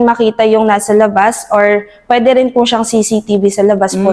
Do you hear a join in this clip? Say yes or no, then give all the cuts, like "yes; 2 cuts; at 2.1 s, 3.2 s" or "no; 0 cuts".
no; 0 cuts